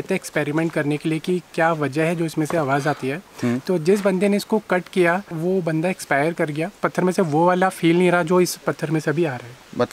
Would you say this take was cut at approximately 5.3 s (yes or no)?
yes